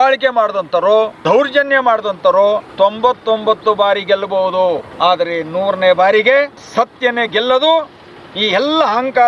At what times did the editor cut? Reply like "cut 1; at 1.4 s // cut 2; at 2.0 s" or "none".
cut 1; at 1.2 s // cut 2; at 2.7 s // cut 3; at 4.9 s // cut 4; at 6.6 s